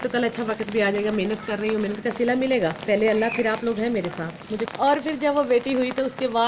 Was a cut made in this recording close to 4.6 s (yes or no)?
yes